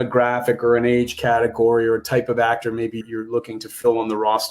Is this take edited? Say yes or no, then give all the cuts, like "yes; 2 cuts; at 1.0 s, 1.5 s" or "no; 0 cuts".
yes; 1 cut; at 3.0 s